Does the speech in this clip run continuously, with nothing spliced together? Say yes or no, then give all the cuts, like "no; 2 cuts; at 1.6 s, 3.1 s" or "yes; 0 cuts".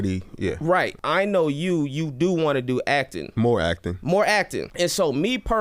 no; 3 cuts; at 1.0 s, 3.2 s, 4.6 s